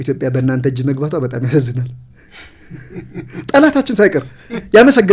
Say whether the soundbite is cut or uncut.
uncut